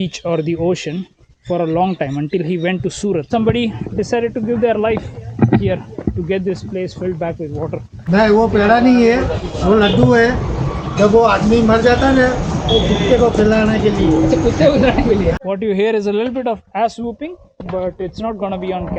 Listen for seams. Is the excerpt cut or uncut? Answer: cut